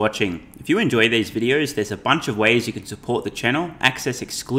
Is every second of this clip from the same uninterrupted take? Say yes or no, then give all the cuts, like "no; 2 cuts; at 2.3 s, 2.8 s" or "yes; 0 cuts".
yes; 0 cuts